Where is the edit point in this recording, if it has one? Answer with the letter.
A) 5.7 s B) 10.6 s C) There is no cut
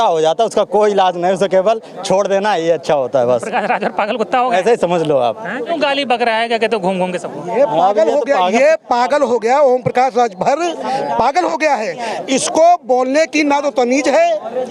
A